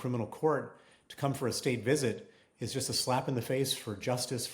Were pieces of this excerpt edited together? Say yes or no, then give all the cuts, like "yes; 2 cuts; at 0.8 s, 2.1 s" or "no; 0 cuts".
no; 0 cuts